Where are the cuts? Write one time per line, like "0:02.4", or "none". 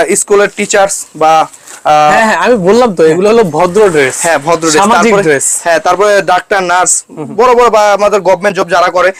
none